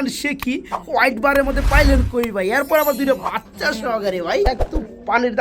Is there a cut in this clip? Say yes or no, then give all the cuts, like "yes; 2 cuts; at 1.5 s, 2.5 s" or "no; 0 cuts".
yes; 1 cut; at 4.5 s